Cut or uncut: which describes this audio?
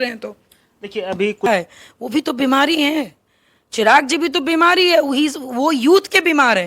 cut